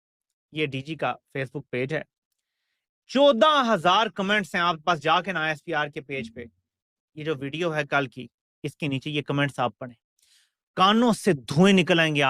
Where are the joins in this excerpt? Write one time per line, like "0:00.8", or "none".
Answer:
none

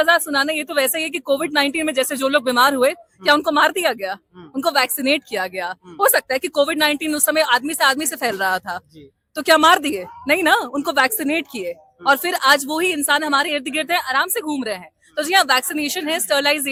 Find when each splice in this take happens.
none

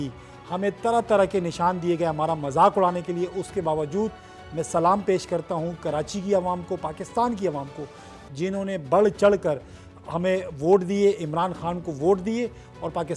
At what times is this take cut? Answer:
none

